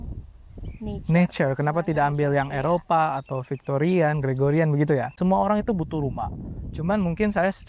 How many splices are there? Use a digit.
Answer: 1